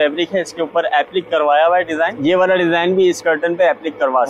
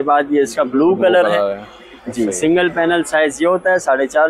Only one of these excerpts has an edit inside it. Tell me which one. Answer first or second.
first